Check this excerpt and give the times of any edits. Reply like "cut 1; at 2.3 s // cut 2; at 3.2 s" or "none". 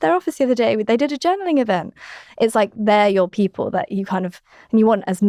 none